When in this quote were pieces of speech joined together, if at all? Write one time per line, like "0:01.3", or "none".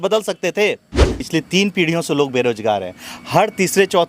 0:01.1